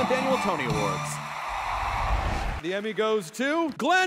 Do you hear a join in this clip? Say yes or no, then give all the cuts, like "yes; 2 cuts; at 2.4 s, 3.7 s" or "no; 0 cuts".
no; 0 cuts